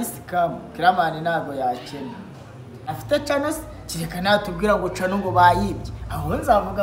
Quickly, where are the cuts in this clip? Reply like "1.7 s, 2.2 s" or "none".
2.9 s